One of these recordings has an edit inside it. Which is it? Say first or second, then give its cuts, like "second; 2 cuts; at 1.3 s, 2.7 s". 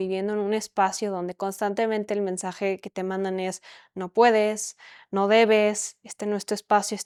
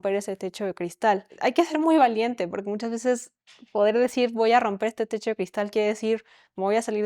second; 1 cut; at 1.3 s